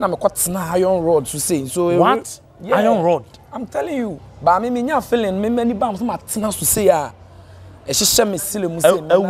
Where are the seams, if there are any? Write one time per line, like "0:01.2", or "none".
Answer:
0:04.2